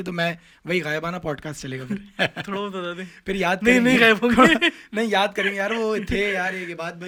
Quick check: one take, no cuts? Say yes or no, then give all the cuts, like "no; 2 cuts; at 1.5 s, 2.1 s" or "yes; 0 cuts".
yes; 0 cuts